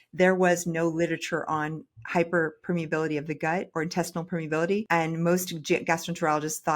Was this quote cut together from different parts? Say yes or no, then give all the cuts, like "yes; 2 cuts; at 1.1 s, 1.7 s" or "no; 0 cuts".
yes; 2 cuts; at 3.7 s, 4.8 s